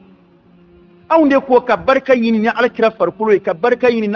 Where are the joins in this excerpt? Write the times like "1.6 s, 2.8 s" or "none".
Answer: none